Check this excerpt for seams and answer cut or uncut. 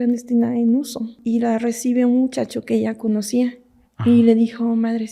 cut